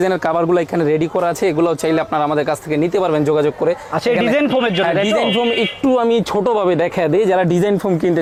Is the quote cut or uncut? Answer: uncut